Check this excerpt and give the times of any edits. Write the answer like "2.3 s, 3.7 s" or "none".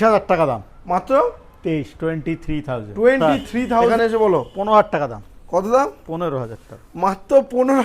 3.9 s

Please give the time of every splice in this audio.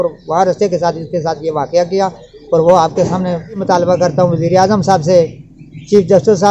3.6 s

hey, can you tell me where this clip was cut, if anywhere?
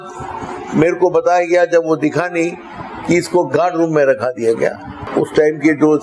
4.9 s

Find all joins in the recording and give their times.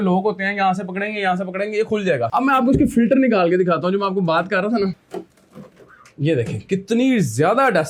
none

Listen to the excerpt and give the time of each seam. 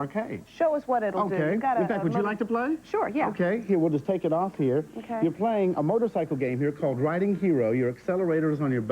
2.0 s

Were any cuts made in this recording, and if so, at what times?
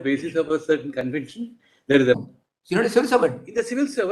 2.2 s

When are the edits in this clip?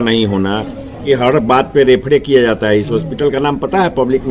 1.0 s

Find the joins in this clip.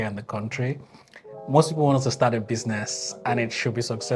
none

